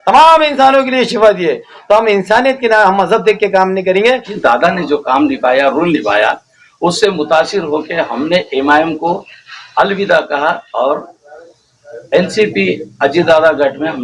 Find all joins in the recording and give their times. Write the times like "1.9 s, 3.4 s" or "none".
4.3 s